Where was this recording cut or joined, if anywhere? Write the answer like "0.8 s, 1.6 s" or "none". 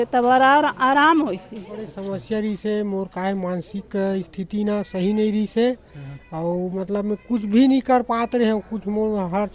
1.9 s